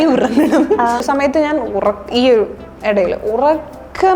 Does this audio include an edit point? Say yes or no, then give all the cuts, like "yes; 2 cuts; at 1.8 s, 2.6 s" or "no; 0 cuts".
yes; 1 cut; at 1.0 s